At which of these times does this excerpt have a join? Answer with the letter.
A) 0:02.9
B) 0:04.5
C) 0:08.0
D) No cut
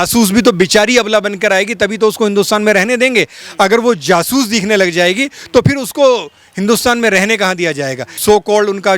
C